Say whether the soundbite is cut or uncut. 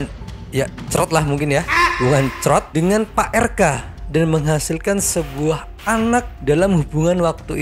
uncut